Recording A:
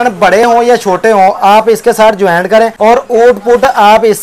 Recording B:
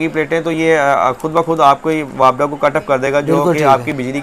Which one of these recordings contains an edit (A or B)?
A